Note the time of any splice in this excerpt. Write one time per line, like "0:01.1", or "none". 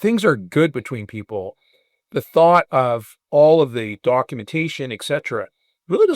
0:03.1